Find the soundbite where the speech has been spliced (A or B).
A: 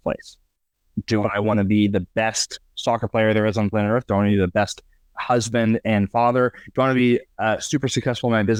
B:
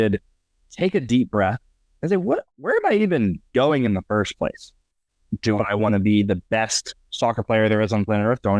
B